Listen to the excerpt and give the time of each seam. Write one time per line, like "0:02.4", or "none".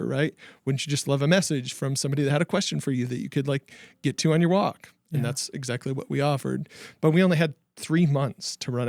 none

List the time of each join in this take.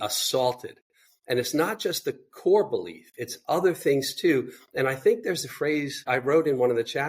0:06.0

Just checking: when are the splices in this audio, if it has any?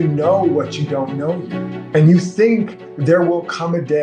0:01.7

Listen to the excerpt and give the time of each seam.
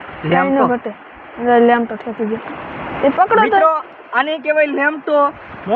none

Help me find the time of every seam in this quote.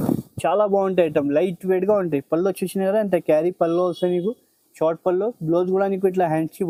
none

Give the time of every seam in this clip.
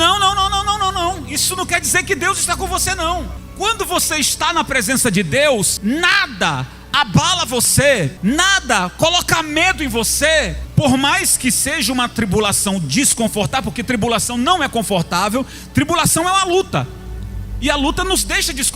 0:03.4
0:05.7
0:08.1
0:10.6

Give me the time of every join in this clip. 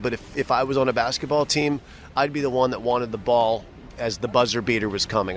none

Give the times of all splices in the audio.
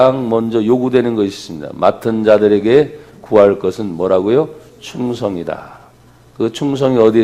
none

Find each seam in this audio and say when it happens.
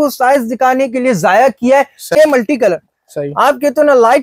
0:02.1

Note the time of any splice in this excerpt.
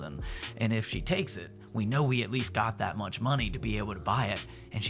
none

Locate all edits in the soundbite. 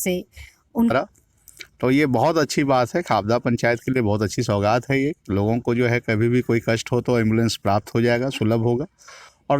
0:00.9

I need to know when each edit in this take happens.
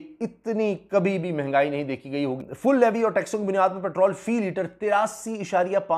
0:02.4

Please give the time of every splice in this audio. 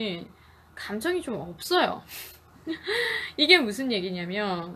none

